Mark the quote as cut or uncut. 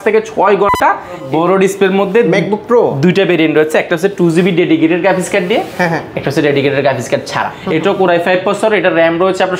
cut